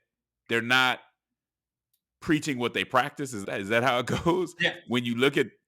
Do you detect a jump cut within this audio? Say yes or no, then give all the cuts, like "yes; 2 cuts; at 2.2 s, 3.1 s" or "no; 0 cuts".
yes; 1 cut; at 3.4 s